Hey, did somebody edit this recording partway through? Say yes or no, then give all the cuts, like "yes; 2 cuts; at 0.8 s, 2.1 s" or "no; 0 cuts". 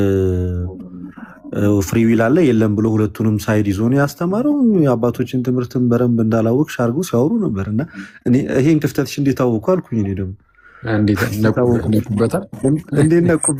no; 0 cuts